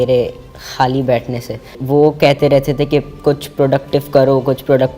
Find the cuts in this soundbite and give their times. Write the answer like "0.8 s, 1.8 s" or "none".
1.8 s